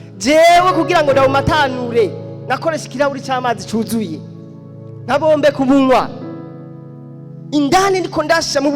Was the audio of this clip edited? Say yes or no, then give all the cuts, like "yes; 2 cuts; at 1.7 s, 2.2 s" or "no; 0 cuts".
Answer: no; 0 cuts